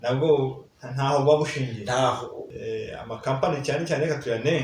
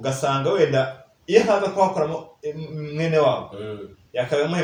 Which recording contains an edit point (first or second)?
first